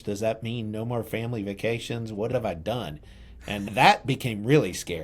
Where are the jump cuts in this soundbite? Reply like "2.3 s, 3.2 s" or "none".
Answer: 2.3 s, 3.7 s